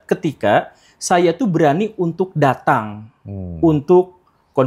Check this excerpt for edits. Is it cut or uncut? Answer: uncut